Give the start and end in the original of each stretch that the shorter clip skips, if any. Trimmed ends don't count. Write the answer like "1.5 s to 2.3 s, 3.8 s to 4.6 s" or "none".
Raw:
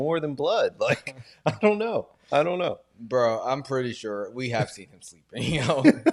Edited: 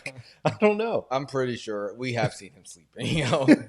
2.1 s to 3.4 s